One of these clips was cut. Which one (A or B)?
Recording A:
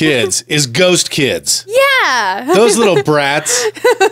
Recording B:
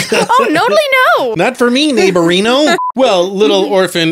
B